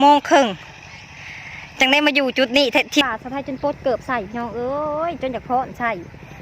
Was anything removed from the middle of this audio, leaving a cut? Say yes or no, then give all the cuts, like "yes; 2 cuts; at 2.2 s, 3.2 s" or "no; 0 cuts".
yes; 1 cut; at 3.0 s